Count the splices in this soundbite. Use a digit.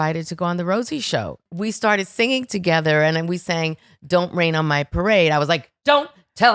1